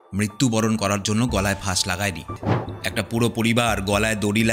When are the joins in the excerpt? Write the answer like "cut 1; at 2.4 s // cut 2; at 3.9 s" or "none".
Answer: cut 1; at 2.3 s